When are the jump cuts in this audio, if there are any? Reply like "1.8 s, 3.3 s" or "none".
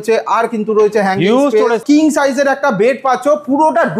1.8 s